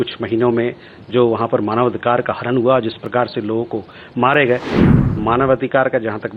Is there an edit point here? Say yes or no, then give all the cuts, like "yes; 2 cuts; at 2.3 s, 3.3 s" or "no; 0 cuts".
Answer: yes; 1 cut; at 4.8 s